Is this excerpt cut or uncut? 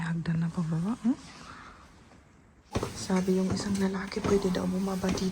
cut